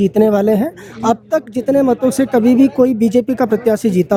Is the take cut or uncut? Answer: uncut